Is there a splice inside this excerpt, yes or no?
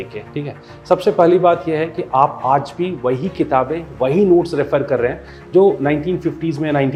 no